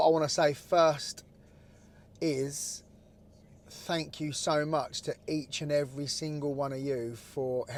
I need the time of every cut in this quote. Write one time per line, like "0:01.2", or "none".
none

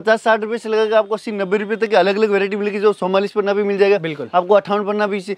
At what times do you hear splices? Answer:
none

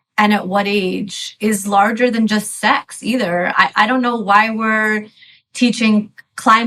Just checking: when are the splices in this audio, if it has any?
none

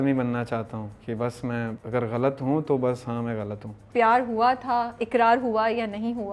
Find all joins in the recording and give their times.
0:01.8
0:03.8

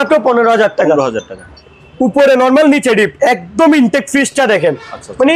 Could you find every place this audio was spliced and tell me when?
none

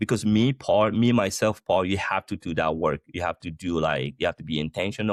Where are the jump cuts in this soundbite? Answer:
none

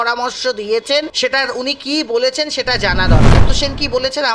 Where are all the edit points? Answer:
0:01.1
0:03.4

